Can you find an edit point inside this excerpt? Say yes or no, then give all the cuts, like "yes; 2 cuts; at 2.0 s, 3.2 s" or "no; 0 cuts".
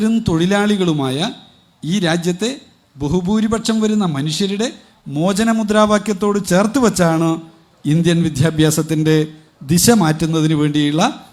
no; 0 cuts